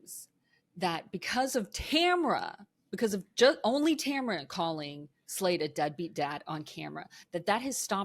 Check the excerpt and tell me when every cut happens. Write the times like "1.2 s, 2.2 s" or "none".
none